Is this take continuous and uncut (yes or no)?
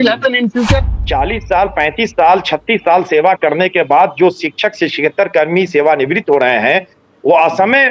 no